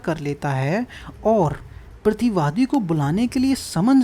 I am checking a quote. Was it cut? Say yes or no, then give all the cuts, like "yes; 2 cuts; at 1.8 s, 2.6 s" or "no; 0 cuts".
no; 0 cuts